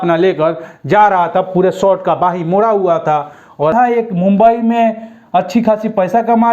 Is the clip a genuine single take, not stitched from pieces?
no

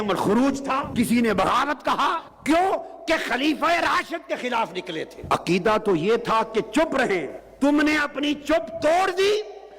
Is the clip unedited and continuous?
no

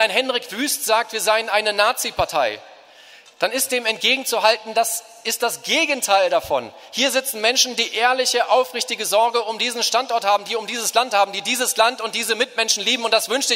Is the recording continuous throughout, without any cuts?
yes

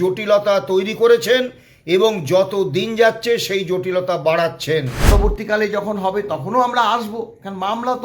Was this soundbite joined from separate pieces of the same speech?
yes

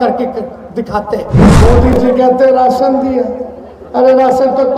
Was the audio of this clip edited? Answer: yes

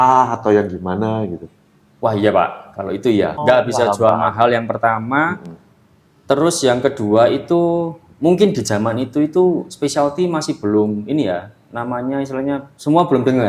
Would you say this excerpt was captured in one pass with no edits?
no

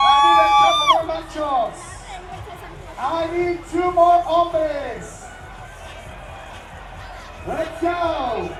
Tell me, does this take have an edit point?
no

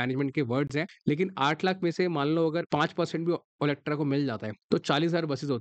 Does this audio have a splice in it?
yes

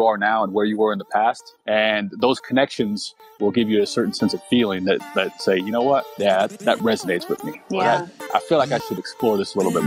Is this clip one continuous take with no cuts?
yes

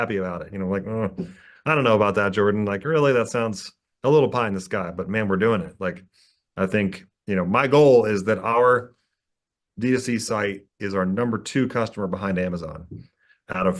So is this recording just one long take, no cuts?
yes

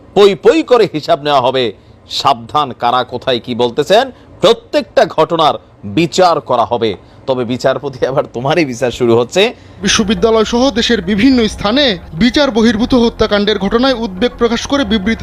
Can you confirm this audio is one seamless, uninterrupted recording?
no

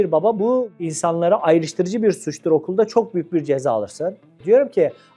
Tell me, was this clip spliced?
no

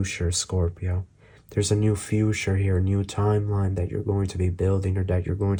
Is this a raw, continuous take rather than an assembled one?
yes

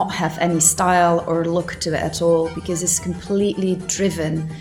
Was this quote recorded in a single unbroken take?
yes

